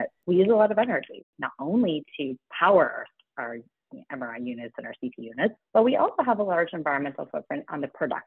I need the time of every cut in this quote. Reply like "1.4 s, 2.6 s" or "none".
1.3 s, 5.6 s